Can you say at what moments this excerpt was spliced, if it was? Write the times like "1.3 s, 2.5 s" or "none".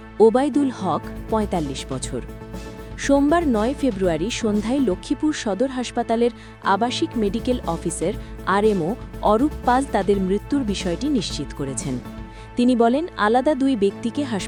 none